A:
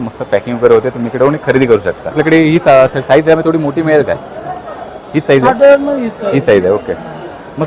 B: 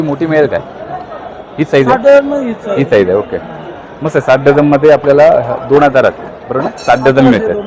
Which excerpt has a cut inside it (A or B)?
A